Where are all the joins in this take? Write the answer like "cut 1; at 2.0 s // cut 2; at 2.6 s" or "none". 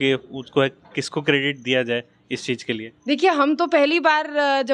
none